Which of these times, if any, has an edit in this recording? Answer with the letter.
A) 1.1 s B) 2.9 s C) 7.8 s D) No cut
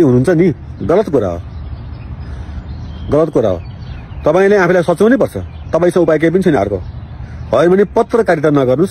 D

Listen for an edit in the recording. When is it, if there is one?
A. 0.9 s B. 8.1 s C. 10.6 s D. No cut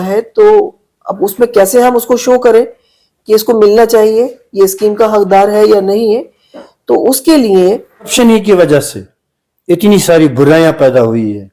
B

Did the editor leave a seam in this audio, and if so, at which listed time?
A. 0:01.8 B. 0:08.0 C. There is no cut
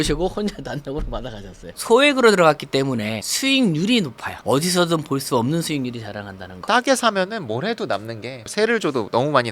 A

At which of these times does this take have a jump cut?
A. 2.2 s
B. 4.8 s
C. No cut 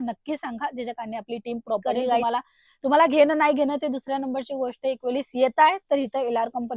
A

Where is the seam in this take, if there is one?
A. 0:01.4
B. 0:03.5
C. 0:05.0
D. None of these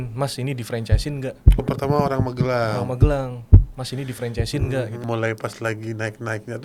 C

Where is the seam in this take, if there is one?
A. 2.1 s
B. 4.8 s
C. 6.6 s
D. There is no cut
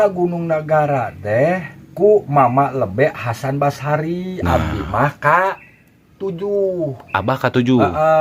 D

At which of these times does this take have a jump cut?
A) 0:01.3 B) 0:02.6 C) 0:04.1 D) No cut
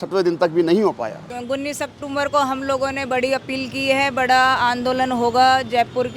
A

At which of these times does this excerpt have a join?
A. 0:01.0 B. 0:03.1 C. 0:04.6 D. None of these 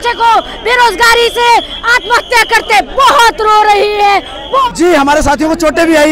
C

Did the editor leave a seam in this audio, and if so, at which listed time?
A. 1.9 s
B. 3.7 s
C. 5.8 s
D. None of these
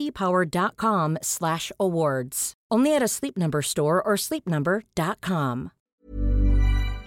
C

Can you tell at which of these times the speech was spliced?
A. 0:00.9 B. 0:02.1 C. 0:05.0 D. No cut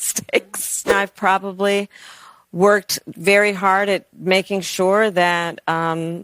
A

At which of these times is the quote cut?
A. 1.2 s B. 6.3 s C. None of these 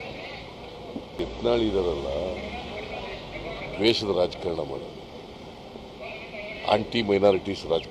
A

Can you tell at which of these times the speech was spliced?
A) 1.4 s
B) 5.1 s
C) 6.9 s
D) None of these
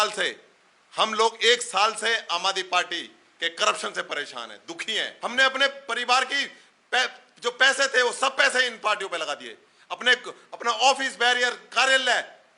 B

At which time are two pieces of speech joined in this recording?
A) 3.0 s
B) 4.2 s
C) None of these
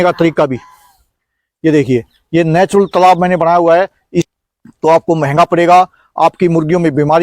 B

